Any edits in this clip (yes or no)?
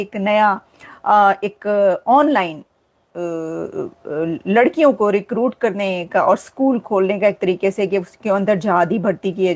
no